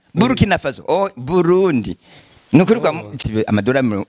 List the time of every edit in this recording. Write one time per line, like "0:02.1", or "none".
0:03.2